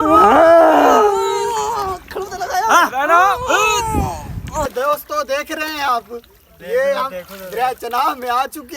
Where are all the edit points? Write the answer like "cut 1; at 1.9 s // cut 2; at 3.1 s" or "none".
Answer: cut 1; at 4.6 s